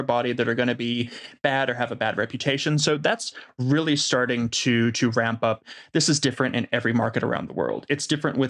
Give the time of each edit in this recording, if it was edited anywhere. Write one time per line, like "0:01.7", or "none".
0:05.6

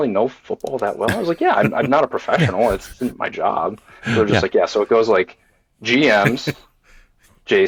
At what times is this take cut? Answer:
none

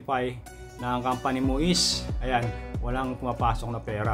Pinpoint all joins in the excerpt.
none

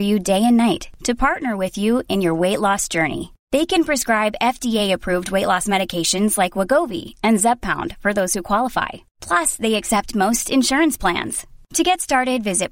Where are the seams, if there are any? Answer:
none

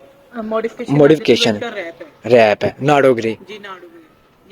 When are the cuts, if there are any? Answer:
none

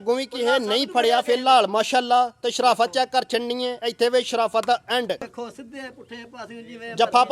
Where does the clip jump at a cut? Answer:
0:05.3

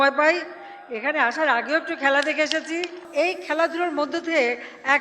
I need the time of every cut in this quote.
0:02.9

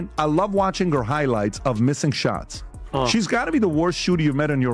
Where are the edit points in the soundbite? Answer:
none

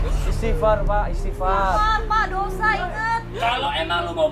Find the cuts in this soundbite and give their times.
0:03.3

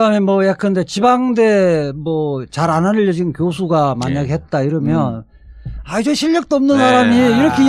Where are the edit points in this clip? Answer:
none

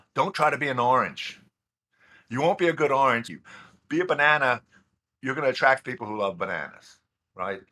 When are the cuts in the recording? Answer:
0:03.4

